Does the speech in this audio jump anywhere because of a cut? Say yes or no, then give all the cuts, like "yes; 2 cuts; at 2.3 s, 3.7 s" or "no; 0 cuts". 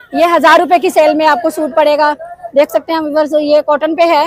no; 0 cuts